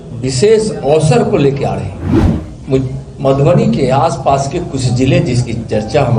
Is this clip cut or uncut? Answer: cut